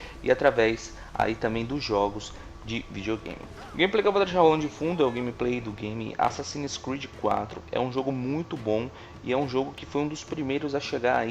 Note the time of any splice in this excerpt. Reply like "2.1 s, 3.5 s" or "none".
7.5 s